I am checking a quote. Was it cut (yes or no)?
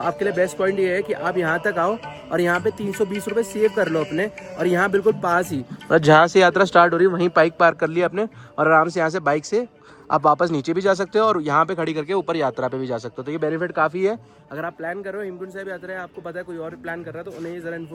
no